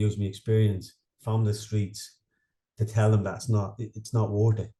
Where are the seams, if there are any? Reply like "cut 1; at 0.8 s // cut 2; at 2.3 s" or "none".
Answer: none